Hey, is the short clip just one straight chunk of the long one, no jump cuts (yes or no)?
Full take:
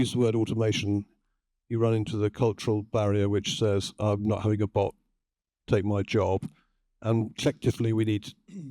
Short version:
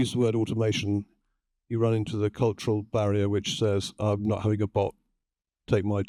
yes